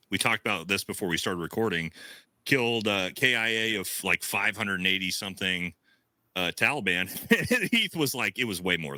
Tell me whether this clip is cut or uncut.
uncut